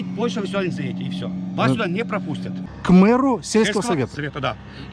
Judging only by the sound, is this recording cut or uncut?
cut